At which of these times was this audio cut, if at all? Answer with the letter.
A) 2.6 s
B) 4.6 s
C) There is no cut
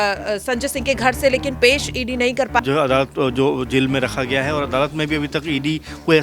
A